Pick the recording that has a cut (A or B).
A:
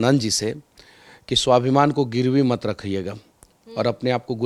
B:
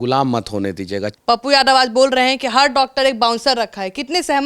B